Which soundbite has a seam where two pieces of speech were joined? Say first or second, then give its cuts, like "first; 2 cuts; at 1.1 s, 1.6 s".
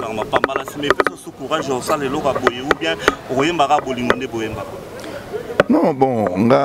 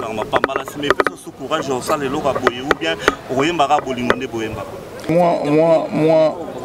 second; 1 cut; at 5.1 s